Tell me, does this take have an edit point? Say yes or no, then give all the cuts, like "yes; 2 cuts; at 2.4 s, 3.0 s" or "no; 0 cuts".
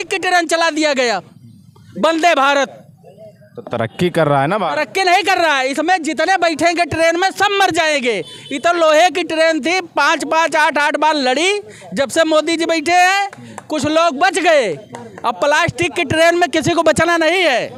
no; 0 cuts